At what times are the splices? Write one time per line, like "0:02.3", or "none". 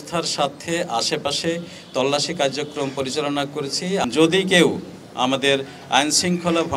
0:04.0